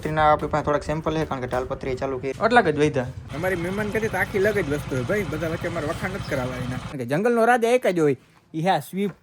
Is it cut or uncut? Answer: cut